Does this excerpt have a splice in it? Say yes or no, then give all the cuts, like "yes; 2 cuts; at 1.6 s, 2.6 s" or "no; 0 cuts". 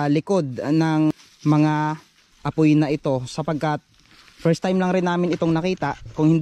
yes; 1 cut; at 1.1 s